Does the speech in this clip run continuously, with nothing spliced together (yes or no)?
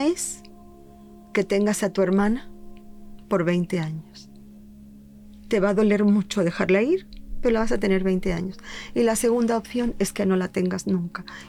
yes